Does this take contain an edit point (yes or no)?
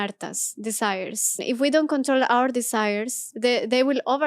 yes